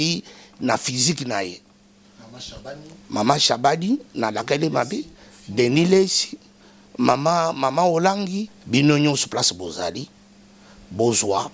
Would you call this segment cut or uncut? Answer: cut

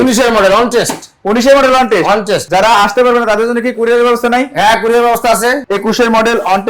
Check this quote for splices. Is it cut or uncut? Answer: cut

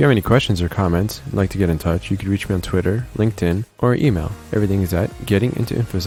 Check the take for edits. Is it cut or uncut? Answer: uncut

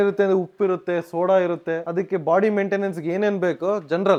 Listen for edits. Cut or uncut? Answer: uncut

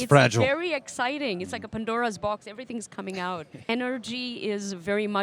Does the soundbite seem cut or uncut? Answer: cut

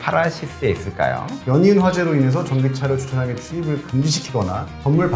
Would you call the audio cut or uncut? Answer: cut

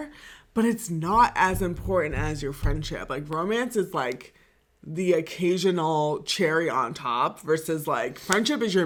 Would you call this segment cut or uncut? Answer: uncut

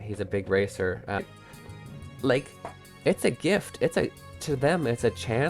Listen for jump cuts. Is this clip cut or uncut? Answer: cut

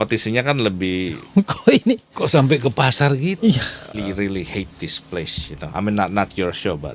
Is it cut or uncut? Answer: cut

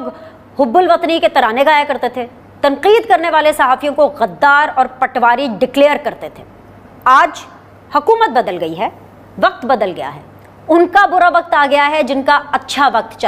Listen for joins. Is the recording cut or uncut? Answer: uncut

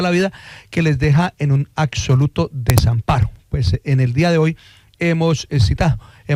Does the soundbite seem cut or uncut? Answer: uncut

